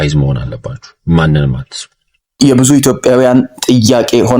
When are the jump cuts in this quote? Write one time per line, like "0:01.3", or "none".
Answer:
0:02.3